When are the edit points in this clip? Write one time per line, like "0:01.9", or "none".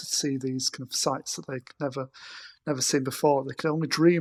none